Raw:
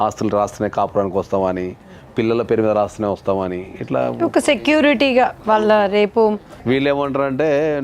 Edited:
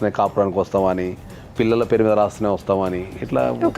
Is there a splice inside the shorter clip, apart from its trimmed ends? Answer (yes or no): no